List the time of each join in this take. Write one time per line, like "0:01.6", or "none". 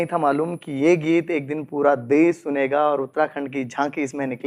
none

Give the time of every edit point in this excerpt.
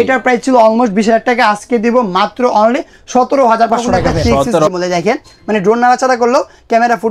0:04.7

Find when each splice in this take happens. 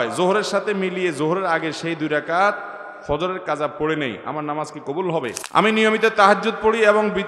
0:05.4

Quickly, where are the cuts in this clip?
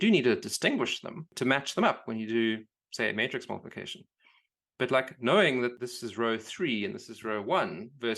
0:01.3
0:05.8

